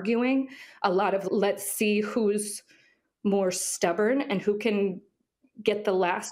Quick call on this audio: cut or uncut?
uncut